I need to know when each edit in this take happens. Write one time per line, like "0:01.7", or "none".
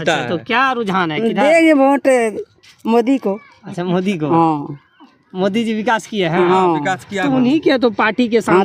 none